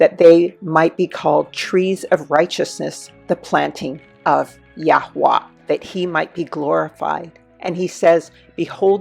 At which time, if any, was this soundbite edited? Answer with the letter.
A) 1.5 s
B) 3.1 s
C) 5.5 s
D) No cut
C